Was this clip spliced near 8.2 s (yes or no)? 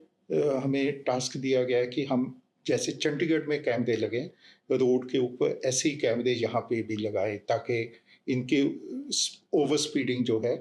no